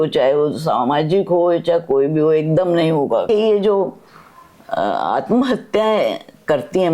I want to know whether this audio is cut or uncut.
cut